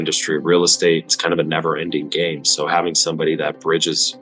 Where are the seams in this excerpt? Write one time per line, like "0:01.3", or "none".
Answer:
0:01.2